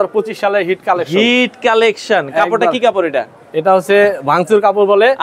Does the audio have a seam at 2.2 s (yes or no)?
no